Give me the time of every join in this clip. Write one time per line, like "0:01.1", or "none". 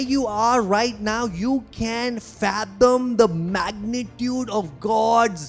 none